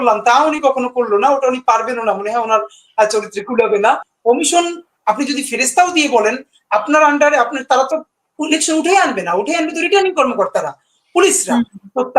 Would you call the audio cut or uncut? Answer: cut